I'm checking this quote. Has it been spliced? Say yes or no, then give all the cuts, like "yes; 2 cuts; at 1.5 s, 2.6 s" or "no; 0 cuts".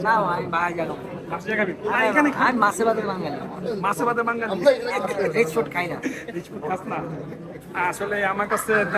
no; 0 cuts